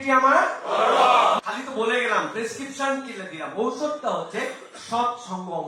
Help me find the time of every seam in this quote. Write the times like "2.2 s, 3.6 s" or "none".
1.4 s